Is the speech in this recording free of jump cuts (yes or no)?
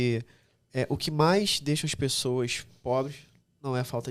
yes